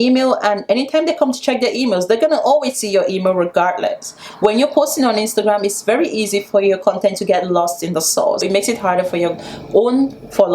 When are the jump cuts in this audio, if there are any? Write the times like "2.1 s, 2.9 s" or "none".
8.4 s